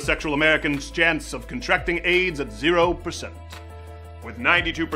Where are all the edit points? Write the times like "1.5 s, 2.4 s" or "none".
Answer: 3.9 s